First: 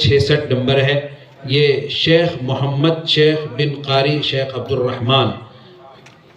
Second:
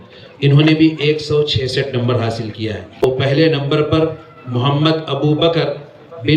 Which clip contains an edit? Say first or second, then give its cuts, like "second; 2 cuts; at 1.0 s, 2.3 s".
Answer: second; 1 cut; at 3.0 s